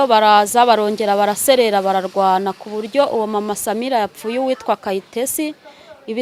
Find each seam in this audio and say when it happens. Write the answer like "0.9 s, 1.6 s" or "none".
none